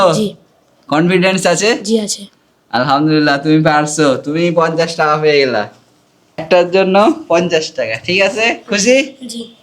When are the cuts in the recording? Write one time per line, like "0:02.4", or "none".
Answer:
0:06.4